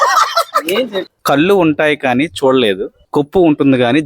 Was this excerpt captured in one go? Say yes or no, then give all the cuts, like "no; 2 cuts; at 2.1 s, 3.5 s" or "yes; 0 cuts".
no; 2 cuts; at 1.1 s, 2.9 s